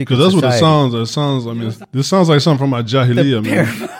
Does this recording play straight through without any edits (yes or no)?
no